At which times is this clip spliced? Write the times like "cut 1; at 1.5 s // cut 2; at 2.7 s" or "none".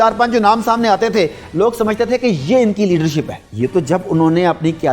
cut 1; at 3.4 s